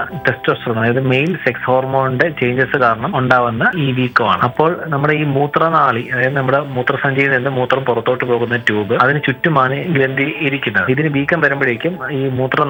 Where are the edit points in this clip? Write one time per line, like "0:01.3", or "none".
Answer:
none

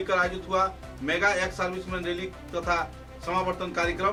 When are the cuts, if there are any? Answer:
none

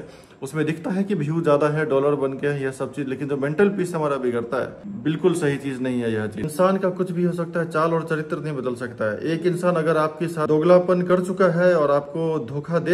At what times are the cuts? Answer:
0:04.8
0:06.5
0:10.4

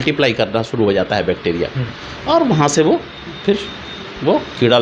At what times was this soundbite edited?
none

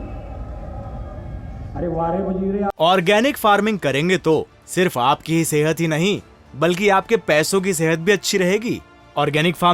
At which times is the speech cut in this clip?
0:02.7

